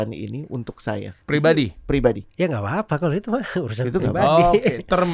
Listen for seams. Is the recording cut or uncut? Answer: cut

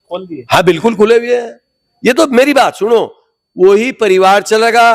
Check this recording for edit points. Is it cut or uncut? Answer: uncut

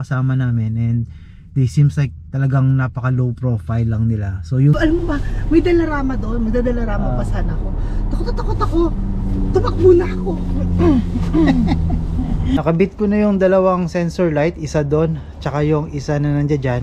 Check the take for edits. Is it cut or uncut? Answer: cut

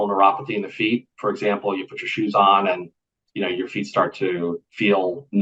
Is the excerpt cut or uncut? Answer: uncut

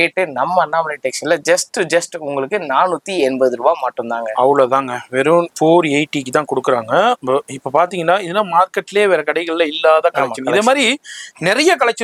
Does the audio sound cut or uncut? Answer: uncut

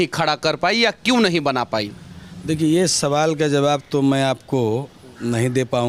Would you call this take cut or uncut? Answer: uncut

